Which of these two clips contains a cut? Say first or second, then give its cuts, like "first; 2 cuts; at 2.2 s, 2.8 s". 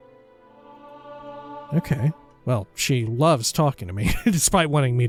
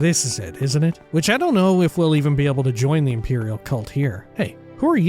second; 2 cuts; at 1.0 s, 4.2 s